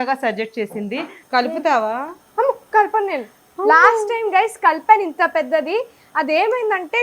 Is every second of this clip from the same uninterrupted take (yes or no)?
no